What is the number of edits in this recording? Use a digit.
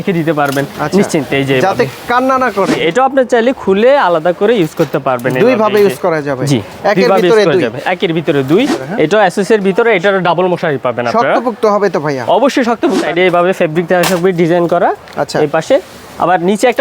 3